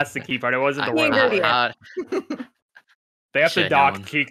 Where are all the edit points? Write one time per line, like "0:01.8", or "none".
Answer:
none